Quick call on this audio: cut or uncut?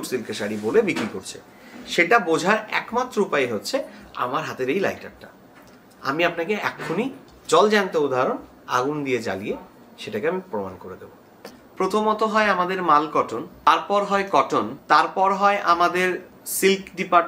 cut